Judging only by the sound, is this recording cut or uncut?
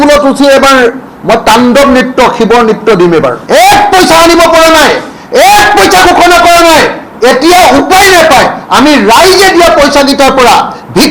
cut